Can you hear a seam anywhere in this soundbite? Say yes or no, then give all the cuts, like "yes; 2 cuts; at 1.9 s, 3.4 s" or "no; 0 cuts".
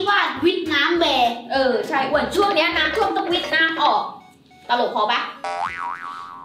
no; 0 cuts